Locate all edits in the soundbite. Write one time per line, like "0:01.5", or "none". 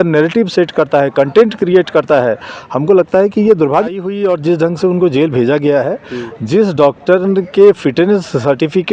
0:03.9